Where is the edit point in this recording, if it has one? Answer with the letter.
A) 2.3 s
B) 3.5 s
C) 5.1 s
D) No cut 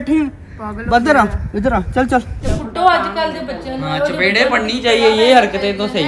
A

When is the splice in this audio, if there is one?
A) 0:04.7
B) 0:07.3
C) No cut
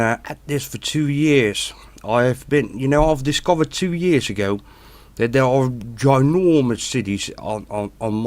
A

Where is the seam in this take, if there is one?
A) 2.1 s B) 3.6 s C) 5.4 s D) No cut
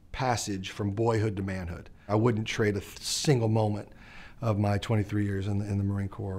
A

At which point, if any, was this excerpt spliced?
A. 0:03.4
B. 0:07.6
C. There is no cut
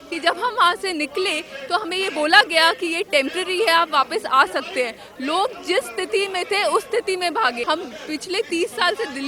B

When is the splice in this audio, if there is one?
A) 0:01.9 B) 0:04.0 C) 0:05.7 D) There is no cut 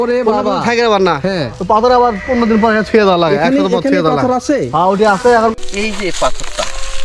C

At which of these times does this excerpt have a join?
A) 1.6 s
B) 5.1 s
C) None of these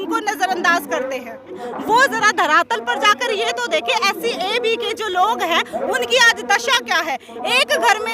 A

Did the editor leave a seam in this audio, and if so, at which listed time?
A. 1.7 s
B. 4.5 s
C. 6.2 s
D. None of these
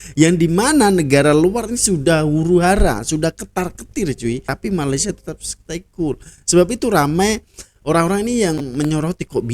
B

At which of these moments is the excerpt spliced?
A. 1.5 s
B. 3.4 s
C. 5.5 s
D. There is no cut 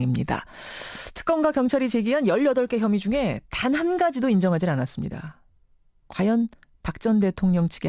D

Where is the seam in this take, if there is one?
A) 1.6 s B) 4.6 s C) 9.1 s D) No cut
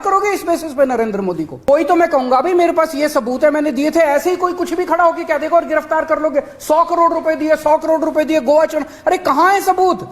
A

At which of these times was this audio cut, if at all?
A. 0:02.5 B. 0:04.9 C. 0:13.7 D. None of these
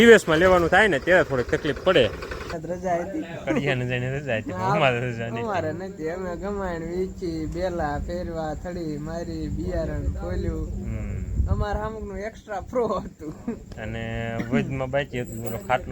A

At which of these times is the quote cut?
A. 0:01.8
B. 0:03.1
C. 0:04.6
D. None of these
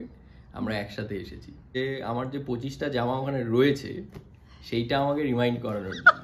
A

